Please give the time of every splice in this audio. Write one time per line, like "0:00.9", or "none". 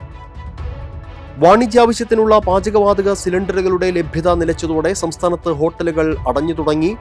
none